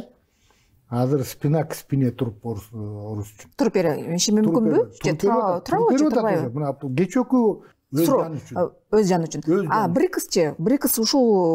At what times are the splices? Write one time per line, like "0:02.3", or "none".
0:07.7